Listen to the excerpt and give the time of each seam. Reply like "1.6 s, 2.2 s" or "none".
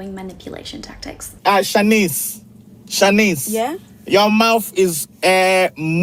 none